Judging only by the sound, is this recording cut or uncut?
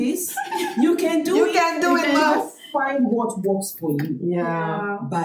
uncut